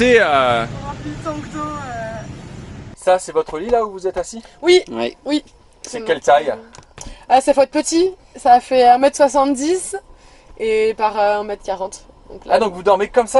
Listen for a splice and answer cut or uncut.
uncut